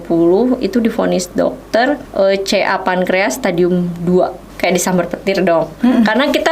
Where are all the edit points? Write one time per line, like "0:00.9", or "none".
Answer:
0:02.1
0:04.4